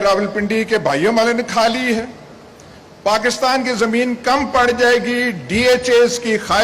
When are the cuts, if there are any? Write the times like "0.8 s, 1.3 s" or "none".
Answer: none